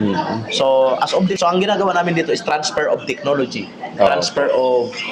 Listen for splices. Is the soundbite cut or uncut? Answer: cut